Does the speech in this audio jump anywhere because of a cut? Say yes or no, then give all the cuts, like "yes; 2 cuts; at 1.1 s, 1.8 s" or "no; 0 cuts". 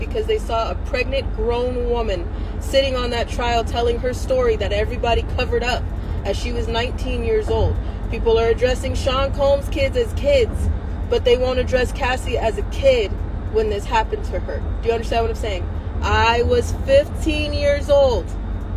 no; 0 cuts